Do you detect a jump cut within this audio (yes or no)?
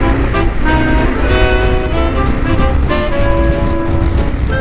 no